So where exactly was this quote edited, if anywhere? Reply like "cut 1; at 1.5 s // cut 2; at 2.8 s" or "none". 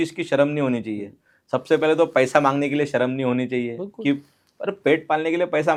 none